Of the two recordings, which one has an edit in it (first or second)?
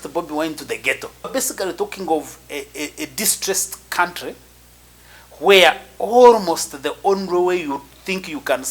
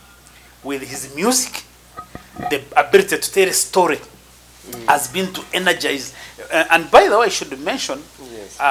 first